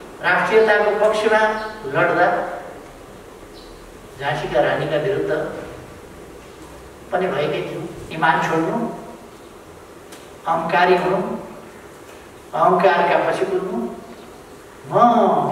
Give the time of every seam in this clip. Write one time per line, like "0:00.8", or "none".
0:08.0